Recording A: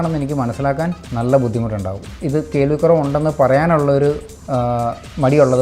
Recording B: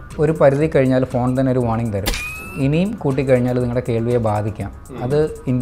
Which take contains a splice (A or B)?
A